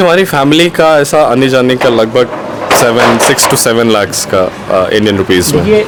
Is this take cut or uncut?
uncut